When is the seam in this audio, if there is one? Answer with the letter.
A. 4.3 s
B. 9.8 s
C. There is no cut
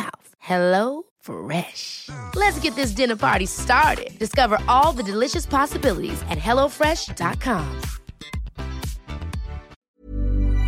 B